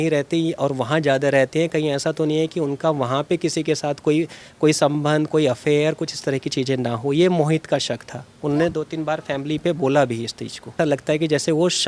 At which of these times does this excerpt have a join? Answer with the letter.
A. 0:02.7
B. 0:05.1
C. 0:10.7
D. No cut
C